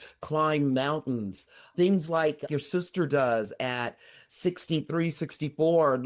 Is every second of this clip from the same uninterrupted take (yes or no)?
no